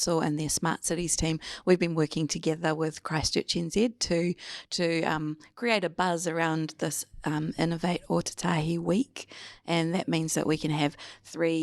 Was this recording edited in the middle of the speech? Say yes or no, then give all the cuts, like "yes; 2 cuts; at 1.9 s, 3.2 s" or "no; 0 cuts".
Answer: no; 0 cuts